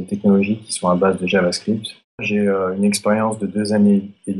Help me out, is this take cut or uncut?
cut